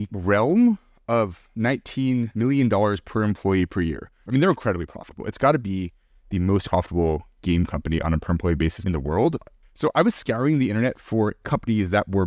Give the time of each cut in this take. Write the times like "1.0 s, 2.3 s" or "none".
4.1 s, 9.5 s